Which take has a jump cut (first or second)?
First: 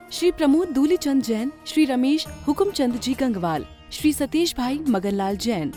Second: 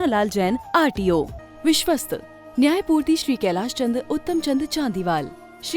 second